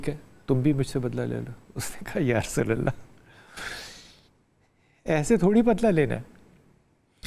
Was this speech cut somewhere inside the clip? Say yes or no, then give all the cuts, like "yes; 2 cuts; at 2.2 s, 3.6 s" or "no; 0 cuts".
no; 0 cuts